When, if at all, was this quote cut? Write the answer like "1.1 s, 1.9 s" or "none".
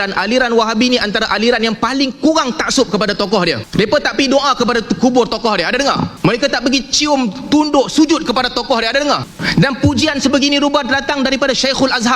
3.6 s, 6.1 s, 9.3 s

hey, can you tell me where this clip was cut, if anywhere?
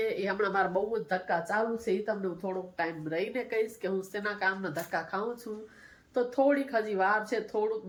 none

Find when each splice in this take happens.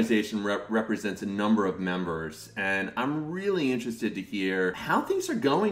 none

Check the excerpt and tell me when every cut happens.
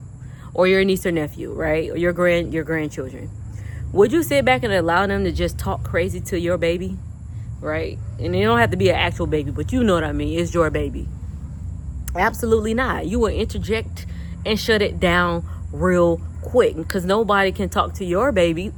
none

